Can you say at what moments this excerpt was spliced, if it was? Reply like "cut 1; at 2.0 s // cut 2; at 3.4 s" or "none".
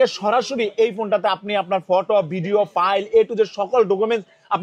none